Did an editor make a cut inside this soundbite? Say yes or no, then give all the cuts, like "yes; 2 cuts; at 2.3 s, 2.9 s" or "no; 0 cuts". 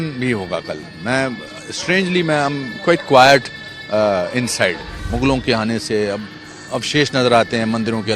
yes; 1 cut; at 5.0 s